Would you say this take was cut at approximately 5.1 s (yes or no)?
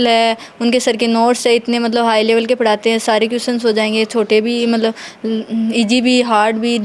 no